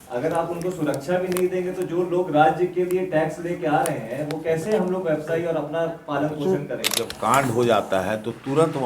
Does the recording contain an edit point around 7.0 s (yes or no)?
yes